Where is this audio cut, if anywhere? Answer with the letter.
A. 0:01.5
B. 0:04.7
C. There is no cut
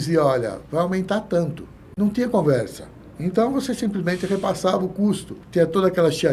C